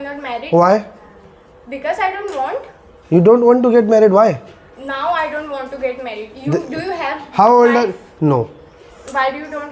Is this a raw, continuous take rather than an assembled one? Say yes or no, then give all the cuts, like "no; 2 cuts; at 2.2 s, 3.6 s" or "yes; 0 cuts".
yes; 0 cuts